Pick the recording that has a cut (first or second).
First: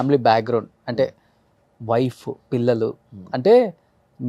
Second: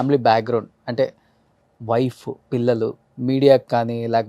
second